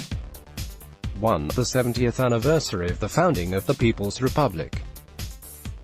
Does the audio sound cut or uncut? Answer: cut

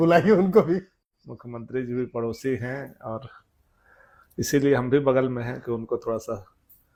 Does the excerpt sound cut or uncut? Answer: uncut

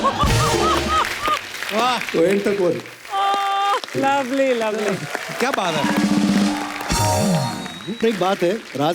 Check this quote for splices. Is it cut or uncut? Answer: cut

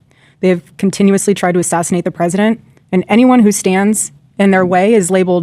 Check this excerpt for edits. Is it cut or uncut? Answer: cut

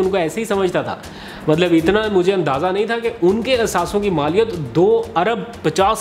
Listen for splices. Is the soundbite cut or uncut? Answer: uncut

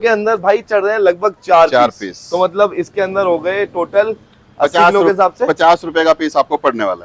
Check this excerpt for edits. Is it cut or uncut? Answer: uncut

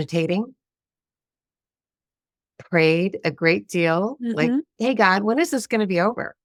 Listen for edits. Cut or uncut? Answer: uncut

